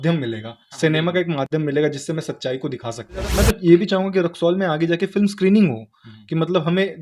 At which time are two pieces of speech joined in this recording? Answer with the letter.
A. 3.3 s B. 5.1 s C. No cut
A